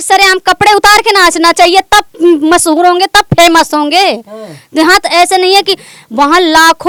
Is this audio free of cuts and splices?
yes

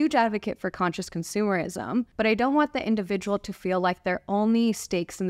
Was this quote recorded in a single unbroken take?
no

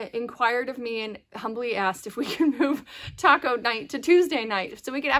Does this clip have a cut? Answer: no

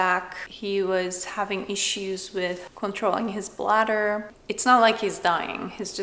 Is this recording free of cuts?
no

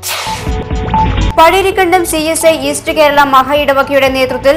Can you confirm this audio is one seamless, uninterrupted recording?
yes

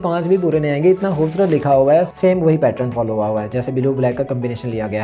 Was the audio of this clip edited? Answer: yes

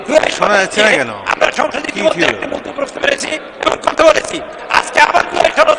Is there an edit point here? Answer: no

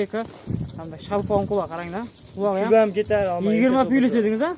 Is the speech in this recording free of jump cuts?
yes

